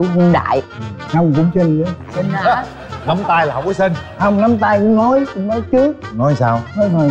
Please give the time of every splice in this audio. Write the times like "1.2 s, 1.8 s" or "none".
none